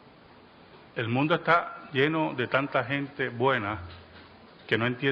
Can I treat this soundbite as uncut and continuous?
no; 1 cut; at 0.9 s

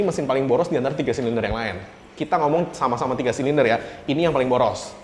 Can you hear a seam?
no; 0 cuts

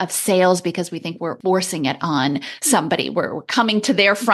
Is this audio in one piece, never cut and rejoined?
no; 1 cut; at 1.4 s

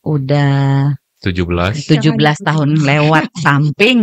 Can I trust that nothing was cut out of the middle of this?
no; 1 cut; at 1.1 s

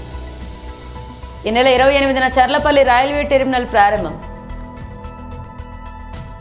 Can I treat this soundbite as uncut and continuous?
no; 1 cut; at 1.3 s

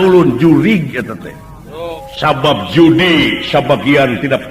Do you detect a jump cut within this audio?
yes; 1 cut; at 2.0 s

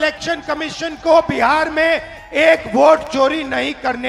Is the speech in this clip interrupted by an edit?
no; 0 cuts

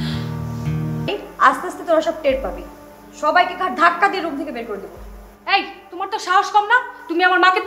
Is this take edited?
yes; 1 cut; at 1.0 s

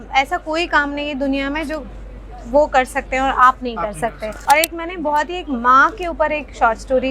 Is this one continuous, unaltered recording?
no; 1 cut; at 4.3 s

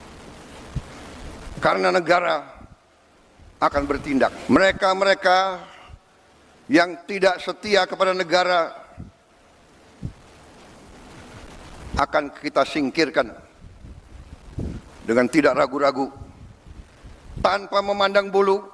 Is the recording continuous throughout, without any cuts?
no; 1 cut; at 4.4 s

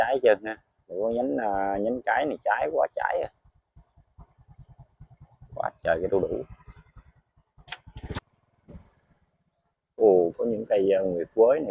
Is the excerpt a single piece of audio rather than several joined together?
no; 1 cut; at 8.2 s

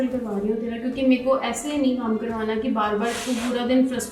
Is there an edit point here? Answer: no; 0 cuts

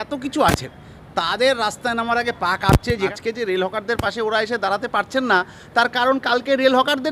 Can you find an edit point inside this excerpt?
yes; 1 cut; at 3.1 s

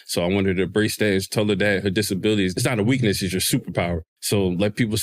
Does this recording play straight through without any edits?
no; 2 cuts; at 2.5 s, 4.1 s

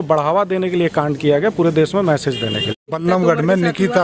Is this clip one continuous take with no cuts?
no; 1 cut; at 2.9 s

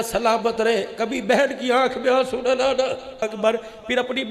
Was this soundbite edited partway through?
yes; 1 cut; at 3.2 s

